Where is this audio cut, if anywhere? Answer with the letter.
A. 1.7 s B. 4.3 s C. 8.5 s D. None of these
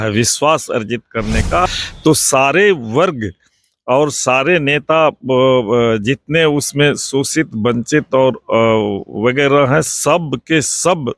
A